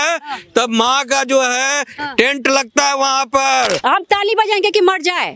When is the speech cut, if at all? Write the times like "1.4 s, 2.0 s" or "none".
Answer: 3.8 s